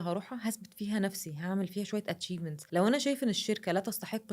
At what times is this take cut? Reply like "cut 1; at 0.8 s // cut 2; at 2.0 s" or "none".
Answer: cut 1; at 2.6 s